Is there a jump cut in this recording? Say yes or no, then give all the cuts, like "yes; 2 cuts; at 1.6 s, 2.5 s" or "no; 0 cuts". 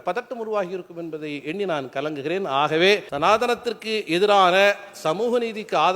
yes; 1 cut; at 3.1 s